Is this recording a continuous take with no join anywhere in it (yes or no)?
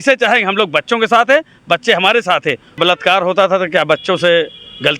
no